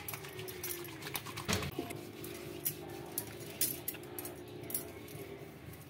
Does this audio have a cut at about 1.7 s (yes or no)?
yes